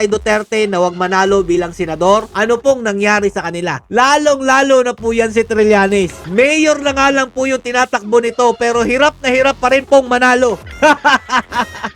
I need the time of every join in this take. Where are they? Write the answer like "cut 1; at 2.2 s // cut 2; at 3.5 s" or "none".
cut 1; at 6.2 s // cut 2; at 10.7 s